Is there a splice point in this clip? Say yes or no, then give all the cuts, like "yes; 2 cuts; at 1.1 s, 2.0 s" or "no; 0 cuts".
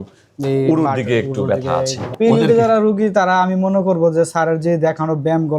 yes; 1 cut; at 2.0 s